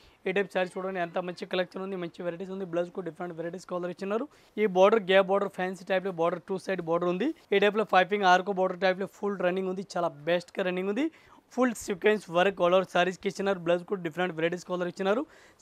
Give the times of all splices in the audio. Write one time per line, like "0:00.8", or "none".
0:04.4
0:07.4
0:11.4